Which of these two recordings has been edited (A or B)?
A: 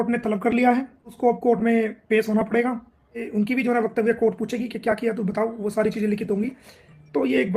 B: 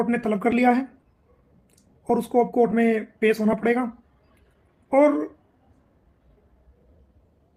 A